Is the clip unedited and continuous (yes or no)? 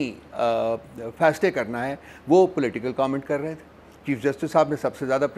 yes